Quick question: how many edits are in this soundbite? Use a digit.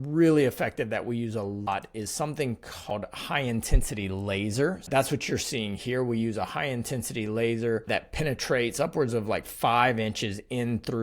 4